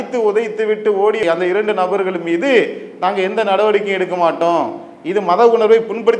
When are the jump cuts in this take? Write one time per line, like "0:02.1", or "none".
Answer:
none